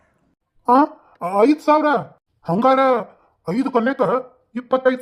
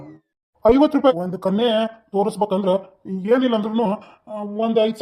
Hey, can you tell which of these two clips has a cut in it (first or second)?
second